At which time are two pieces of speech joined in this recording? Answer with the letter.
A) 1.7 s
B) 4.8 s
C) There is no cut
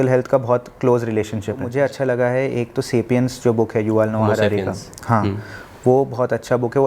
A